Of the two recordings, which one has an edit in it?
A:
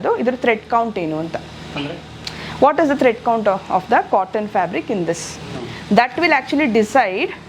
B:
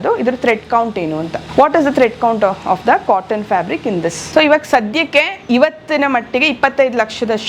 B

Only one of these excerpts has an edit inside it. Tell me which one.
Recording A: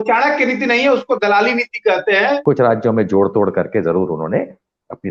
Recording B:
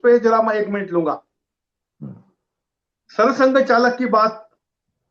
A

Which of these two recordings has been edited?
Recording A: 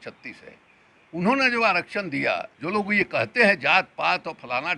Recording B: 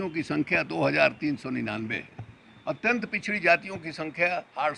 A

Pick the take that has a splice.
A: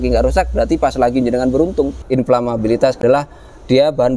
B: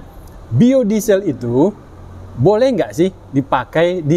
A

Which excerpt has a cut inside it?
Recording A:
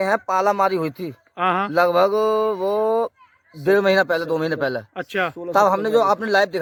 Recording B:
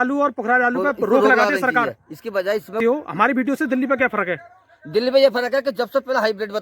B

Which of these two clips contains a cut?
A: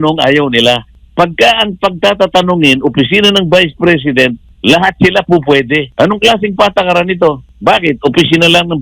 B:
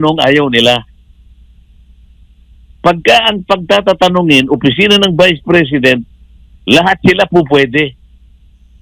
A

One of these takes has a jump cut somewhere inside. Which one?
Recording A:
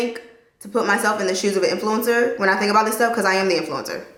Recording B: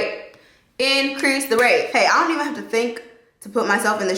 B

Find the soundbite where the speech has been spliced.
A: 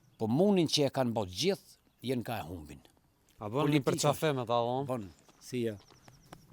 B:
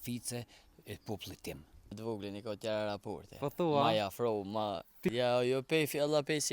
B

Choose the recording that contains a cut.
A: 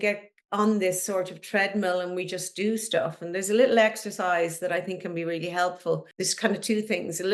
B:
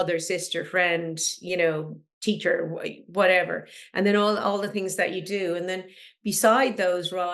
A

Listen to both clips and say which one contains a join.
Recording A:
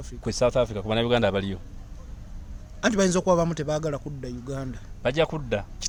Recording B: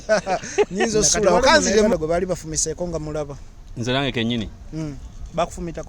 B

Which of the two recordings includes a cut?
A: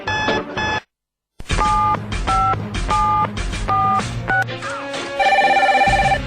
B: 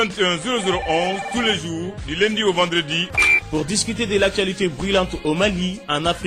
A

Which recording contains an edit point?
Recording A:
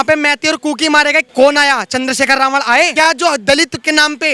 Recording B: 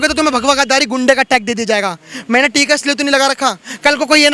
A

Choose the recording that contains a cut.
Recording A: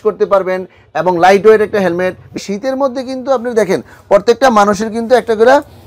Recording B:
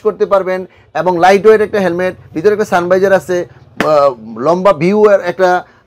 A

